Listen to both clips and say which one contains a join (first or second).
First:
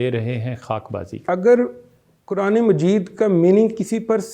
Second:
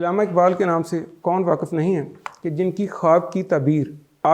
first